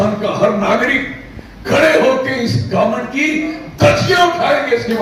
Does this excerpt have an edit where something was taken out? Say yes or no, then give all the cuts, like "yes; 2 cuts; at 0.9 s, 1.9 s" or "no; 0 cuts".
no; 0 cuts